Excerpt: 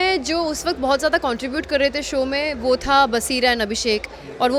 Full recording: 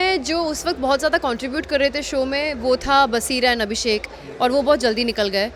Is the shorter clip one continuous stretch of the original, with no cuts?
yes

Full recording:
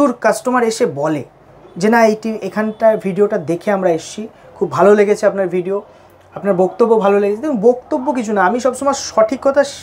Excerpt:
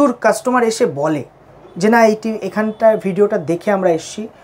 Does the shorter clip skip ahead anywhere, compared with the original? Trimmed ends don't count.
no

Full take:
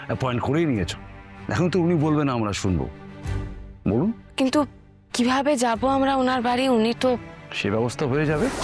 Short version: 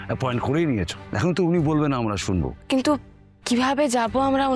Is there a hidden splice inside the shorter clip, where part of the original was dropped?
yes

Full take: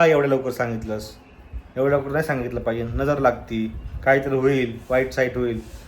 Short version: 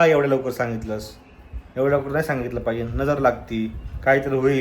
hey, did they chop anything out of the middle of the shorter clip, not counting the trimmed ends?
no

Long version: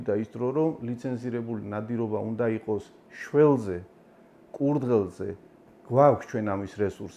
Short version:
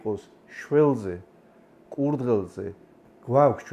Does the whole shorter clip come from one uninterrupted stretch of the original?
yes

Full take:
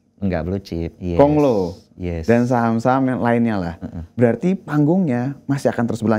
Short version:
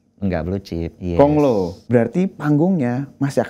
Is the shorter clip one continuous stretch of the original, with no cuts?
no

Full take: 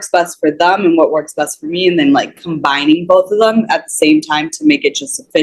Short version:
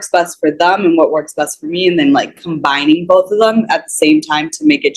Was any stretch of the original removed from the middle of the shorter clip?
no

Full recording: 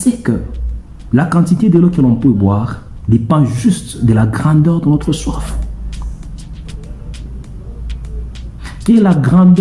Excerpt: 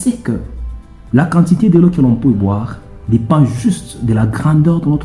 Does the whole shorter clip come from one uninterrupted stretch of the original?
yes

